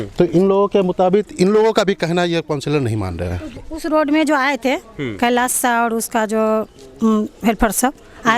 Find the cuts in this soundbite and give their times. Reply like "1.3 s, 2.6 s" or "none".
3.6 s